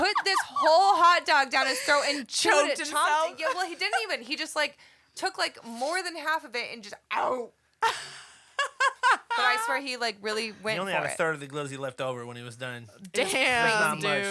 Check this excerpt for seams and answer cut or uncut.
uncut